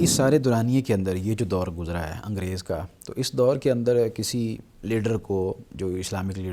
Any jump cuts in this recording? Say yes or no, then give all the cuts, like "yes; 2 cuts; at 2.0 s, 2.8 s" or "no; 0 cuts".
no; 0 cuts